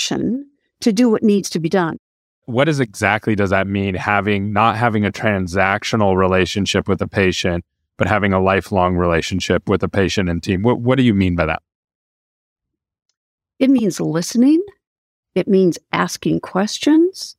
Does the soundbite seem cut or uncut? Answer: cut